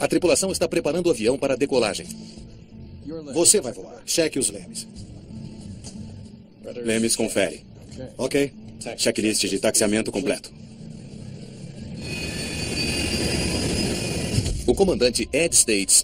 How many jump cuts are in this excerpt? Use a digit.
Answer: 1